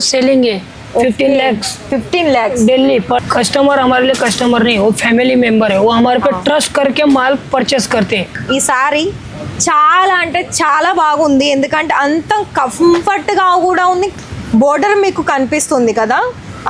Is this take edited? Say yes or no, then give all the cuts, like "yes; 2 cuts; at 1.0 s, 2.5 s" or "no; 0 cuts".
yes; 3 cuts; at 3.2 s, 8.4 s, 14.1 s